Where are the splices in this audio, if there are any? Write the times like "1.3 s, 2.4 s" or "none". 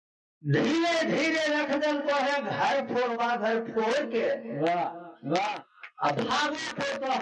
none